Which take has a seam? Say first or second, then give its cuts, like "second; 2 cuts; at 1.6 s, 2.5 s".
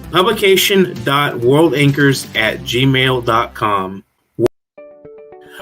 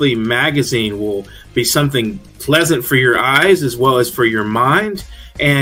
first; 1 cut; at 4.5 s